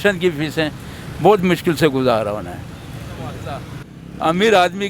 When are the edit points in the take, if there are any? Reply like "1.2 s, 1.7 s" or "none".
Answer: 3.7 s